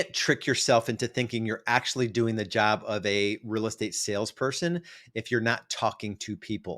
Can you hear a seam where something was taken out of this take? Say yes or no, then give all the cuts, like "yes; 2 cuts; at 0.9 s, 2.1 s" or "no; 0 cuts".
no; 0 cuts